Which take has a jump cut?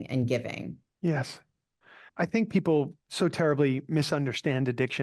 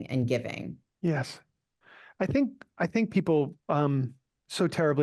first; 2 cuts; at 2.0 s, 3.0 s

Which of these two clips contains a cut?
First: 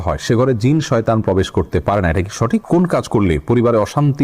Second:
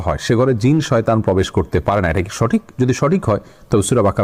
first; 1 cut; at 2.6 s

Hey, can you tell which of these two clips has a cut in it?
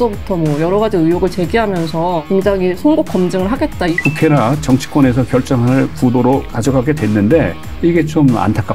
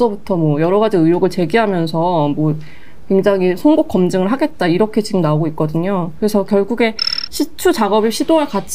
first; 4 cuts; at 2.2 s, 3.9 s, 6.5 s, 7.6 s

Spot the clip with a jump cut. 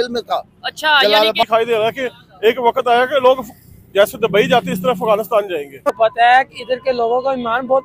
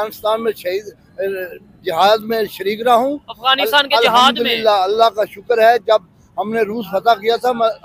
first; 2 cuts; at 1.4 s, 6.0 s

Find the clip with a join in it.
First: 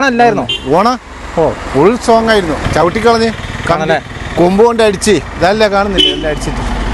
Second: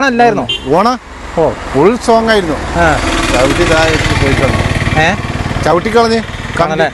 first; 1 cut; at 2.6 s

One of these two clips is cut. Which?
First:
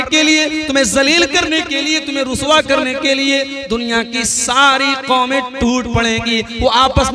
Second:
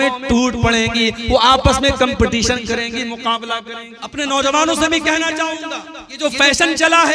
second; 2 cuts; at 3.9 s, 6.2 s

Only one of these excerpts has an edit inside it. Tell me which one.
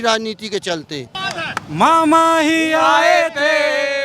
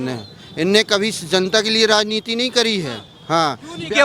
first; 1 cut; at 1.2 s

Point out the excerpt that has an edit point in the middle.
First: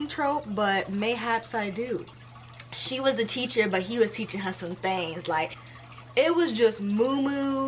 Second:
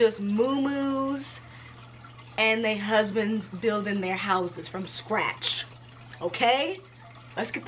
first; 2 cuts; at 2.2 s, 5.6 s

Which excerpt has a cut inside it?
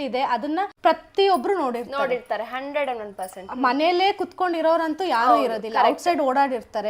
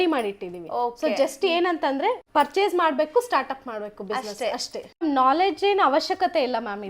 second; 1 cut; at 5.0 s

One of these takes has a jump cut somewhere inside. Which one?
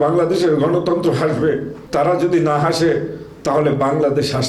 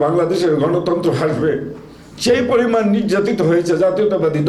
first; 1 cut; at 1.8 s

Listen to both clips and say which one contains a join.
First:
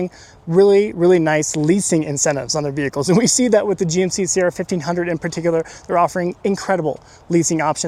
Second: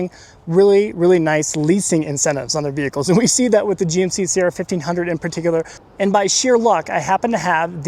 second; 1 cut; at 5.8 s

